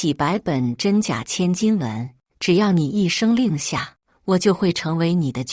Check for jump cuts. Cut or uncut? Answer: uncut